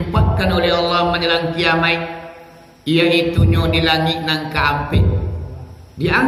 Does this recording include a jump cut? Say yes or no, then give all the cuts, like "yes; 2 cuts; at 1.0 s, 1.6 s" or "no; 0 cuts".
no; 0 cuts